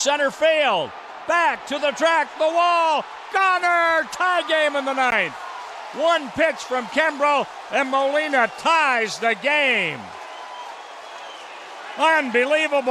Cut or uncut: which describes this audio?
uncut